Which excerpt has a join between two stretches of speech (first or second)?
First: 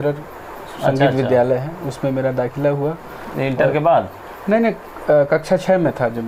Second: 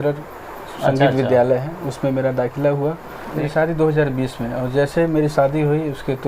second